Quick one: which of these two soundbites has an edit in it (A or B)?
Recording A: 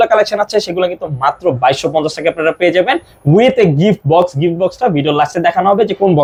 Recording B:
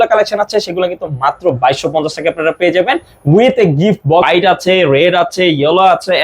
B